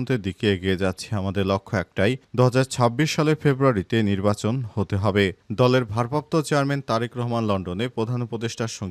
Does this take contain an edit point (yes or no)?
no